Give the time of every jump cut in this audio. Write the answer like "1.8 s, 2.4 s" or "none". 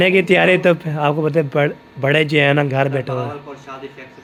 none